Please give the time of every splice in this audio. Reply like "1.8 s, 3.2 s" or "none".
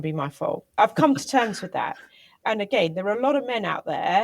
0.8 s, 2.4 s